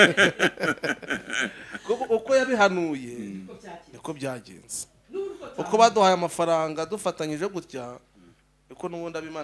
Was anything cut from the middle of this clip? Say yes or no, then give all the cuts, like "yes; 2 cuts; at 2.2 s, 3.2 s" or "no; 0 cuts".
no; 0 cuts